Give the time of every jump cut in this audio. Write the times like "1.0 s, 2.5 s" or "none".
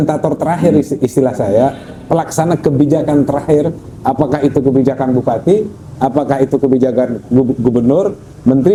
none